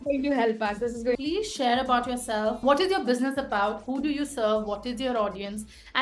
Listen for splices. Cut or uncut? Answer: cut